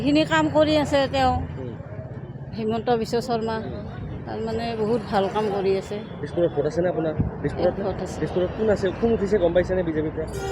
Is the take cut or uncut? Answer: uncut